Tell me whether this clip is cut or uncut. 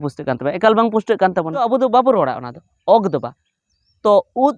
cut